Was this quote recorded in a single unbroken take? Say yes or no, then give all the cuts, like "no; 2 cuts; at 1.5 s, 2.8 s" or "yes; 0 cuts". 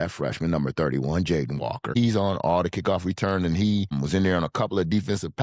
no; 2 cuts; at 1.9 s, 3.9 s